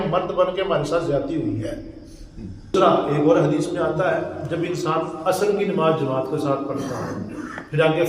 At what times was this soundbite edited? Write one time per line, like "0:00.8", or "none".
0:02.7